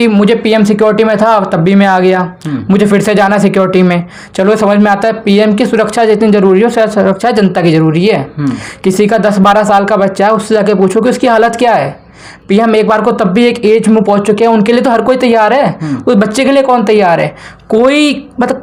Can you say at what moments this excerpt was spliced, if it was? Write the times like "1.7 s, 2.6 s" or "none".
none